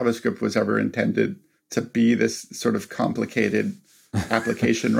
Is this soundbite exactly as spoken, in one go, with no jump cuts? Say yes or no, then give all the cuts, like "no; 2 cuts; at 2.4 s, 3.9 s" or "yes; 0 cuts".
yes; 0 cuts